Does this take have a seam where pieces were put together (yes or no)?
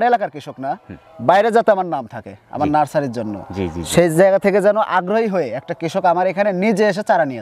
no